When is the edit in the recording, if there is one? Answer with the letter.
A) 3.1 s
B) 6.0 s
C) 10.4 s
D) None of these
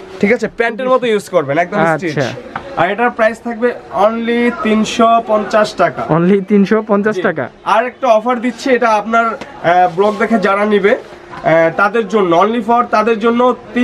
D